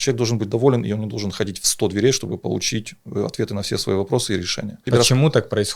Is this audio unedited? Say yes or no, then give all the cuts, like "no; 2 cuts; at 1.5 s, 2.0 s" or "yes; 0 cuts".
no; 1 cut; at 4.9 s